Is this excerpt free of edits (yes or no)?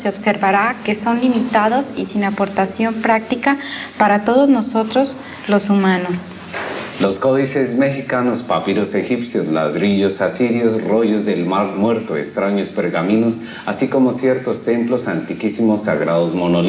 no